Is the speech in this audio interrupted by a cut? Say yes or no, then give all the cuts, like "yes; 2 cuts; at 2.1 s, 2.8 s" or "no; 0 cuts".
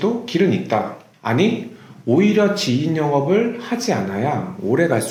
no; 0 cuts